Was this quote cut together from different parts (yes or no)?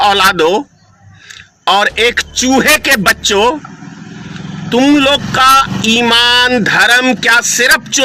no